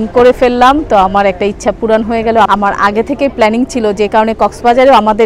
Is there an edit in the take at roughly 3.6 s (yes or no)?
no